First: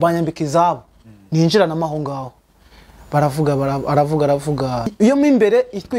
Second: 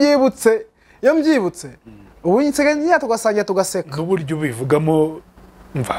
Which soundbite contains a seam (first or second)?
first